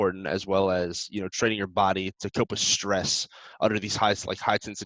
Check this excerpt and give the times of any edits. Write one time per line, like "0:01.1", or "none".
none